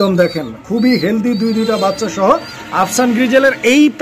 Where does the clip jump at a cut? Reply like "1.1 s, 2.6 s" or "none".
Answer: none